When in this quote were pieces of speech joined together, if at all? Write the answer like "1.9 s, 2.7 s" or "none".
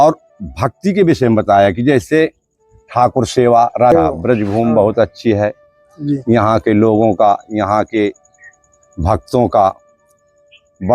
3.9 s

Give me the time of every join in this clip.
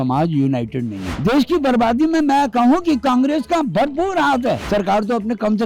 1.1 s, 4.6 s

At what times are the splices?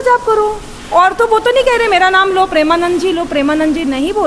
none

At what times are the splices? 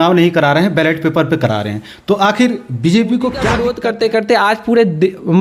3.7 s

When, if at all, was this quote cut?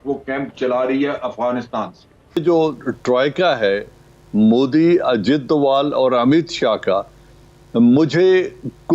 2.4 s

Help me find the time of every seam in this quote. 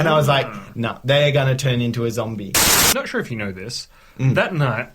2.7 s

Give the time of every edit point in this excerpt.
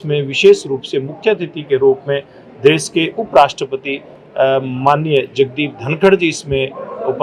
none

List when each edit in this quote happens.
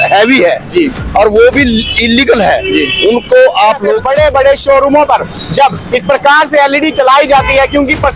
4.0 s

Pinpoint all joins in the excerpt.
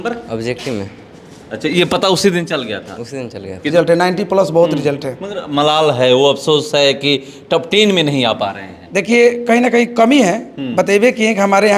3.7 s

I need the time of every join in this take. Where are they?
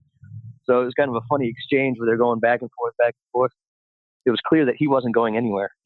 4.2 s

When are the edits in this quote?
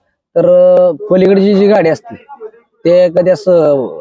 none

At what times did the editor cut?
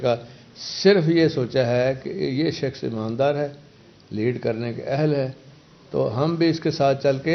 none

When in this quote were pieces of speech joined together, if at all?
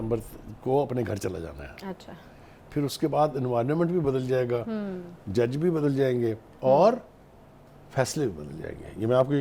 none

